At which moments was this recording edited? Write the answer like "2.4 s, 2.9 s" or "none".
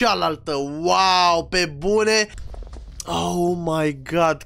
2.4 s